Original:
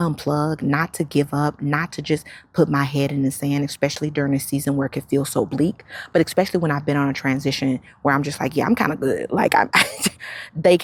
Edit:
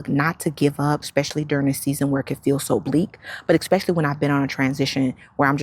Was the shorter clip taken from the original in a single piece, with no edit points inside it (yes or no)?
no